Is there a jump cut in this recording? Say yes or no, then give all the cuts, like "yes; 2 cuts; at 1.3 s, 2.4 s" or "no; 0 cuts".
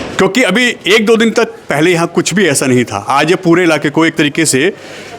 no; 0 cuts